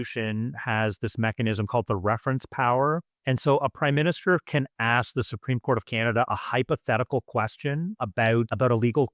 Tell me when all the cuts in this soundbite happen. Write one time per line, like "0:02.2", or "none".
none